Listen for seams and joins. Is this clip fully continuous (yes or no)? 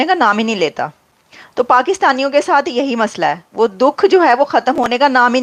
yes